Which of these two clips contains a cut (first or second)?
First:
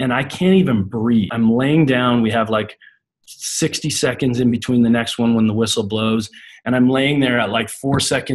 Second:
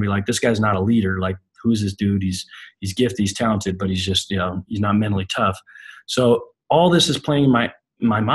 first